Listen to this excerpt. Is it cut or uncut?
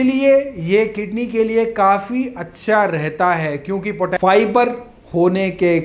cut